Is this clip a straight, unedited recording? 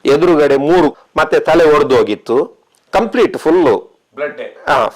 yes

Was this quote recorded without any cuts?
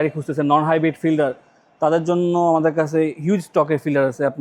yes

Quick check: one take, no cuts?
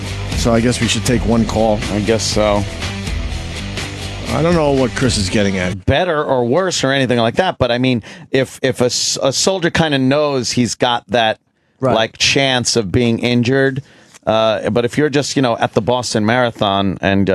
yes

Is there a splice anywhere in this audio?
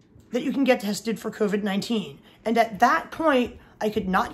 no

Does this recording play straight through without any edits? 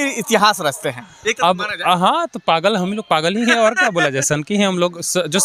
yes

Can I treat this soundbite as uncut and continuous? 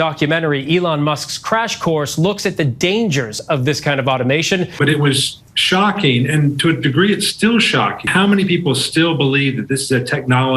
no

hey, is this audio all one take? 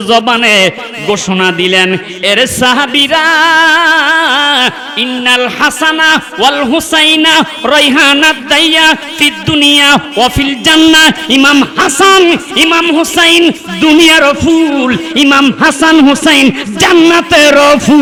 yes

